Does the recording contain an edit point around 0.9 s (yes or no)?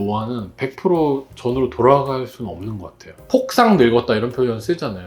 no